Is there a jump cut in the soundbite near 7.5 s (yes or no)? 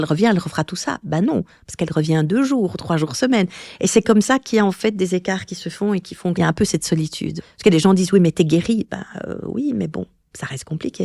yes